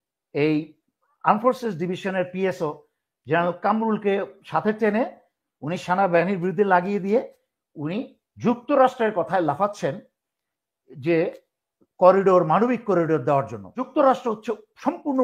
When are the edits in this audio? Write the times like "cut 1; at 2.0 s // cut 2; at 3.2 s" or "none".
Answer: cut 1; at 13.8 s